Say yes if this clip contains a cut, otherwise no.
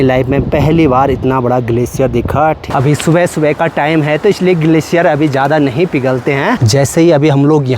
yes